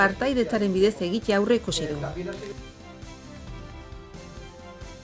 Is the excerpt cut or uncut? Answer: cut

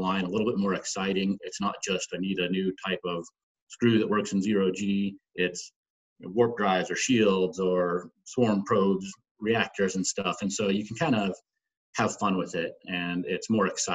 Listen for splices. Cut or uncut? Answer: uncut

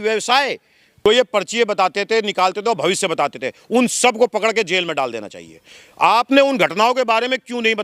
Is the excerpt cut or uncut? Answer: cut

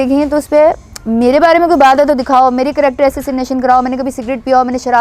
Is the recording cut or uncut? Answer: uncut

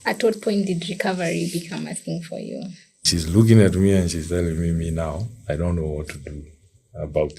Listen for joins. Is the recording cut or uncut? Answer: cut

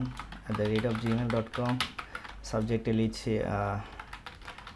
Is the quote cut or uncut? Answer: uncut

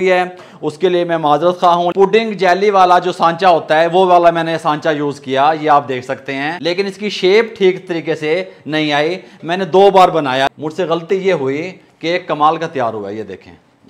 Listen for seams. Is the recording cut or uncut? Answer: cut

